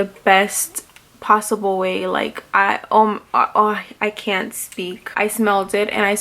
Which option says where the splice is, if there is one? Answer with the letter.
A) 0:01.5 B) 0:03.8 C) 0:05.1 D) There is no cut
C